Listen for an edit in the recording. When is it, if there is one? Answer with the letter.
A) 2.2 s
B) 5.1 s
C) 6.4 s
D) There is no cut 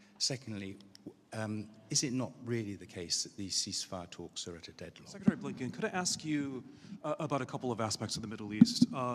B